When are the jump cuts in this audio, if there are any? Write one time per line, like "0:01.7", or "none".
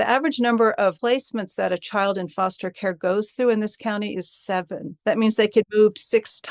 0:01.0
0:04.8
0:05.7